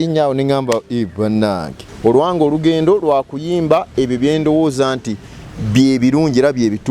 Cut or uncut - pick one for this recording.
cut